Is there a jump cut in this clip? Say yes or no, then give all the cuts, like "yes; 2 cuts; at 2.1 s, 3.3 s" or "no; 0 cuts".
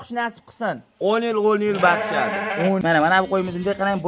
yes; 1 cut; at 2.8 s